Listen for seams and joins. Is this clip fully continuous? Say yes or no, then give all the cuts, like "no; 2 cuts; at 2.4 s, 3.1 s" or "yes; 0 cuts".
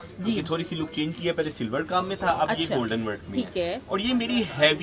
yes; 0 cuts